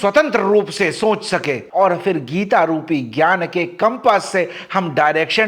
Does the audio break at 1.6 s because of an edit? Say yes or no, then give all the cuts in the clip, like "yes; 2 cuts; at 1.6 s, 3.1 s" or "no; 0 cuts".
yes; 1 cut; at 1.6 s